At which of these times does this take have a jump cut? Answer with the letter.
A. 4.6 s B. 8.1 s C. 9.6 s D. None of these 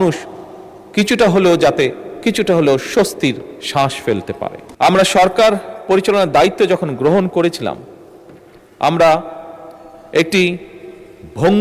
A